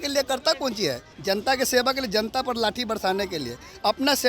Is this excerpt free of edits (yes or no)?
no